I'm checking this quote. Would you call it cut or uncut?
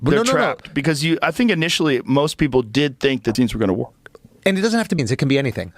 cut